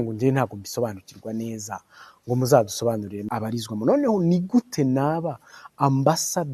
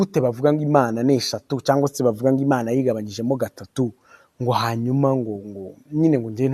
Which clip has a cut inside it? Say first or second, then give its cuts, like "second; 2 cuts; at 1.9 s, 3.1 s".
first; 1 cut; at 3.3 s